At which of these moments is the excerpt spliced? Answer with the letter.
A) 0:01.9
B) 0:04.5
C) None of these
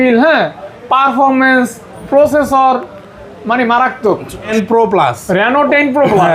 B